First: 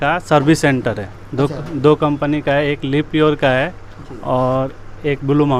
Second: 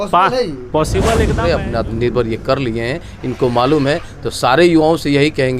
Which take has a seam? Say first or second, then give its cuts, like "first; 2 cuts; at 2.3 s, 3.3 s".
second; 1 cut; at 1.3 s